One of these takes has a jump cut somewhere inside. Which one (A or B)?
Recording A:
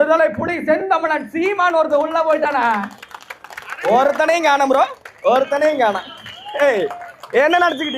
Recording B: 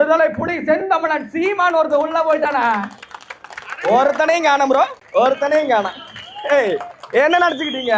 B